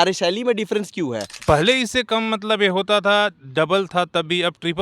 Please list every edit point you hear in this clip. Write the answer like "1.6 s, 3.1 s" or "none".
1.3 s